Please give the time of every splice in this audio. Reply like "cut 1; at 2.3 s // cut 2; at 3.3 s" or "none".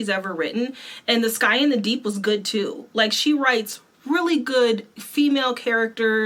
none